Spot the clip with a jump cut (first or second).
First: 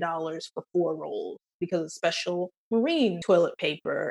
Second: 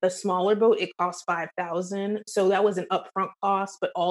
first